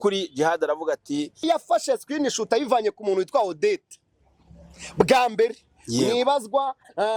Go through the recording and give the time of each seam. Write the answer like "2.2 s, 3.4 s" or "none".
1.4 s